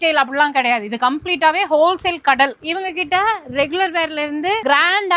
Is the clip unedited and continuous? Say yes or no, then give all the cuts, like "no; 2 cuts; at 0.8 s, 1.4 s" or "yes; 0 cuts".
no; 1 cut; at 2.6 s